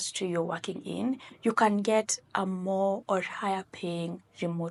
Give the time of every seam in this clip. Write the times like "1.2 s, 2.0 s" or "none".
none